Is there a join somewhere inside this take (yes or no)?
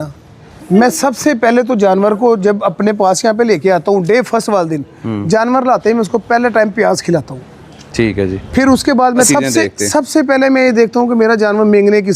yes